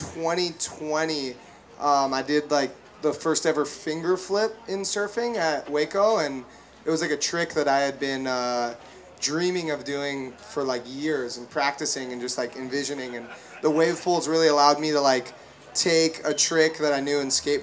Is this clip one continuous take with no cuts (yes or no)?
yes